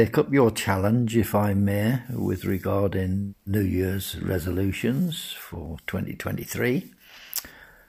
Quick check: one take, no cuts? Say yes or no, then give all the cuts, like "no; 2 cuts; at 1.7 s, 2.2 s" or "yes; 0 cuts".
yes; 0 cuts